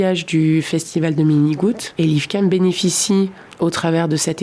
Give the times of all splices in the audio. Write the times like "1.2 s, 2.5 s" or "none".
1.9 s, 3.4 s